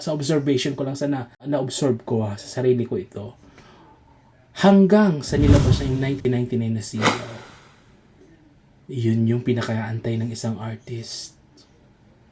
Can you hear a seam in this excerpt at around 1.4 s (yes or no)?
yes